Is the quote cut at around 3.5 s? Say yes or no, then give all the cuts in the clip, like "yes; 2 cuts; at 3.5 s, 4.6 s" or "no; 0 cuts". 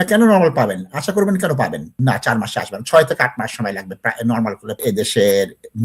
no; 2 cuts; at 1.9 s, 4.8 s